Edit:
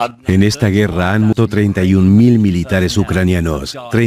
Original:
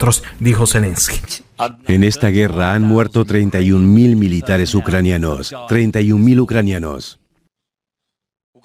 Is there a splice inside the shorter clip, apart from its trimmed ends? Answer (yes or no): yes